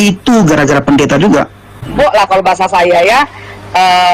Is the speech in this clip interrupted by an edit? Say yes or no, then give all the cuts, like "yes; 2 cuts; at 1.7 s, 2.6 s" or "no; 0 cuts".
yes; 1 cut; at 1.9 s